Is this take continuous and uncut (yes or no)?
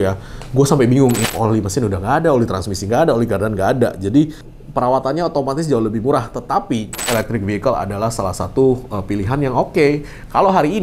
no